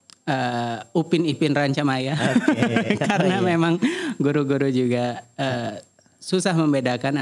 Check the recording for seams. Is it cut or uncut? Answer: uncut